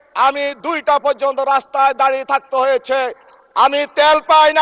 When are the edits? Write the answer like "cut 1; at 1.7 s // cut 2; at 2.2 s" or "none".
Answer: none